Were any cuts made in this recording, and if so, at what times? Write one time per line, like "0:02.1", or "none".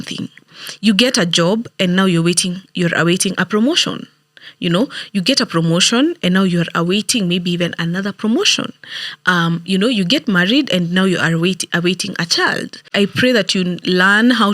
0:12.9